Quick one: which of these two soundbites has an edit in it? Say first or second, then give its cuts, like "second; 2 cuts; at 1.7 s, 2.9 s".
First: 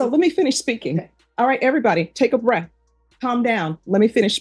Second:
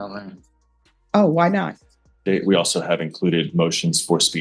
second; 1 cut; at 2.2 s